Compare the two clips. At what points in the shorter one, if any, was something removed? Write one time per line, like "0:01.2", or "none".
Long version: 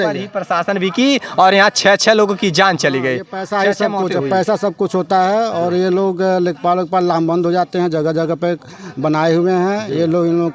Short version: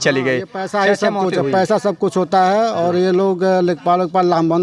none